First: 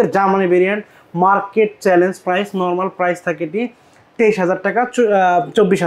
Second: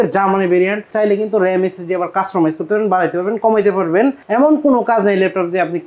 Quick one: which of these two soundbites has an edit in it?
second; 2 cuts; at 0.9 s, 4.2 s

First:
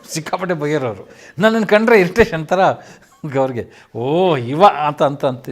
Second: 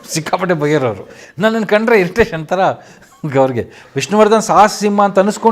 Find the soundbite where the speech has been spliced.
second; 1 cut; at 3.9 s

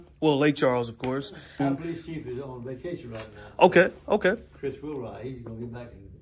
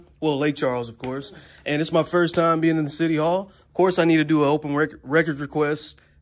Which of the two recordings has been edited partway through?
first; 1 cut; at 1.6 s

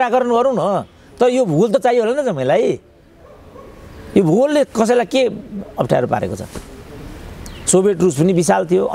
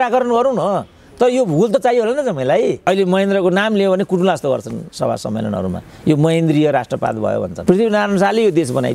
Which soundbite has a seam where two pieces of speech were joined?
second; 2 cuts; at 2.9 s, 7.5 s

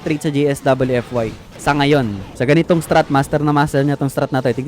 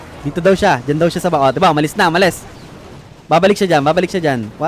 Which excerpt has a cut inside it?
first; 2 cuts; at 1.4 s, 2.2 s

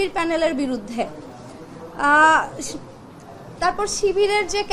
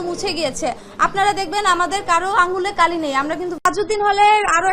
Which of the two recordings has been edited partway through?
second; 1 cut; at 3.6 s

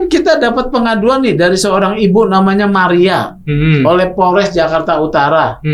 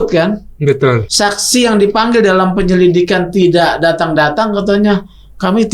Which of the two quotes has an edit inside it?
second; 1 cut; at 1.1 s

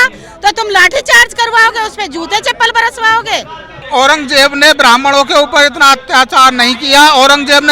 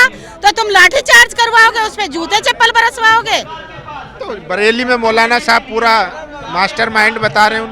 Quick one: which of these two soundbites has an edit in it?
first; 1 cut; at 3.8 s

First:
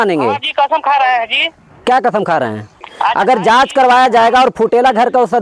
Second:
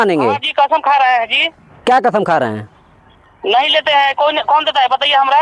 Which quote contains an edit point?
first; 1 cut; at 2.9 s

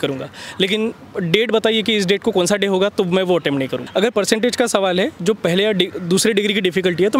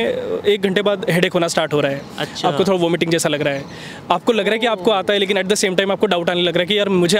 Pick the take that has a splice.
first; 1 cut; at 3.8 s

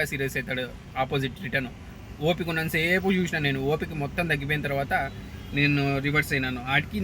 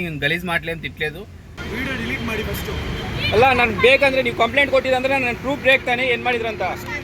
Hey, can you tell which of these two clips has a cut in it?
second; 1 cut; at 1.5 s

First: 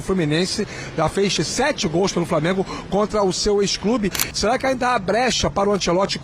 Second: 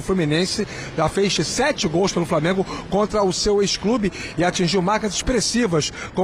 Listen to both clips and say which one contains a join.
first; 1 cut; at 4.2 s

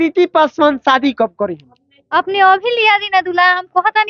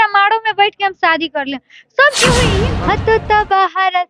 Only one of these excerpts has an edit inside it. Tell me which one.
second; 1 cut; at 2.5 s

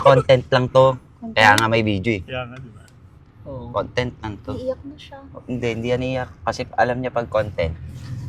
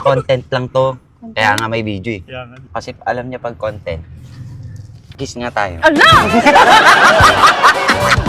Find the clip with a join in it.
second; 1 cut; at 2.6 s

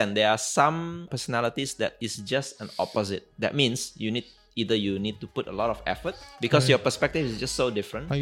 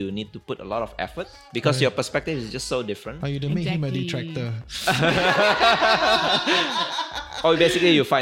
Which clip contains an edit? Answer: first; 2 cuts; at 1.1 s, 3.3 s

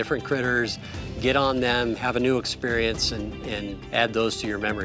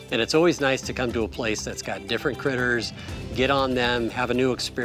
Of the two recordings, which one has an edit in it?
first; 1 cut; at 3.8 s

